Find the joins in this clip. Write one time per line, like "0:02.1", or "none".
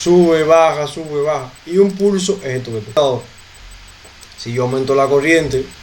0:02.9